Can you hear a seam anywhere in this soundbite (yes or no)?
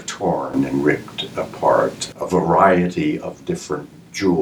yes